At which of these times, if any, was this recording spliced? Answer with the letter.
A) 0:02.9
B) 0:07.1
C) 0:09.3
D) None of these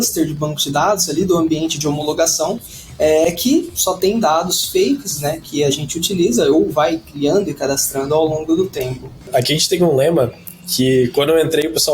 C